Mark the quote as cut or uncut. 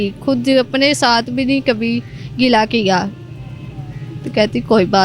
uncut